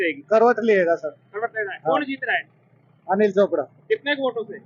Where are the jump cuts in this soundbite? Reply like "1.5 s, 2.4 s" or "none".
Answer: none